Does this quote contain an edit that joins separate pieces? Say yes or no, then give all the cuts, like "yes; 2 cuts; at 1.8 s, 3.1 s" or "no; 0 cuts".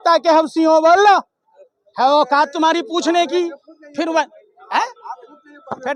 no; 0 cuts